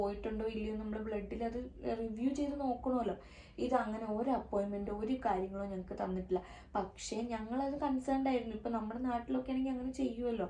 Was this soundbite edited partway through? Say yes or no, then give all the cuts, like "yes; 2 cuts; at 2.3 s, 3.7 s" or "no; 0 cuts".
no; 0 cuts